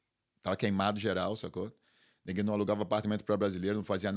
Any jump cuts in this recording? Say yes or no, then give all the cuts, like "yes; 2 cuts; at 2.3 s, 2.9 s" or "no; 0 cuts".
no; 0 cuts